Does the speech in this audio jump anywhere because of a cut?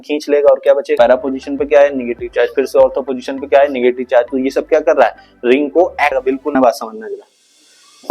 yes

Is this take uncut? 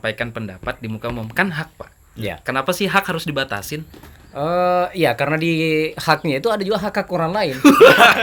yes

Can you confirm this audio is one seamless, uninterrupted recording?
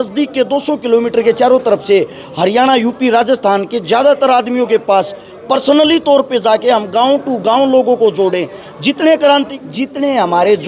no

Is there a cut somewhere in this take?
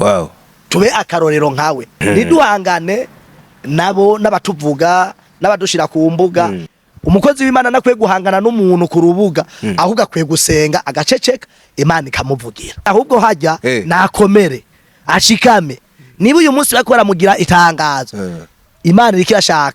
yes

